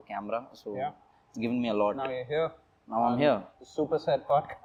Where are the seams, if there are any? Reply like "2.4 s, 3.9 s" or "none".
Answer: none